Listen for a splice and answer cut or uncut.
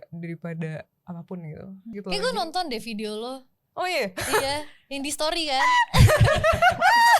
cut